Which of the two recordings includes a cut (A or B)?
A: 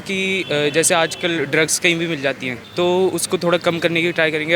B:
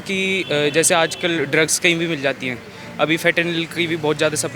A